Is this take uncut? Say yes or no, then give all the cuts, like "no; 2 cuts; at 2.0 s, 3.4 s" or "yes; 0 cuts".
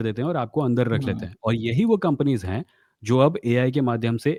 yes; 0 cuts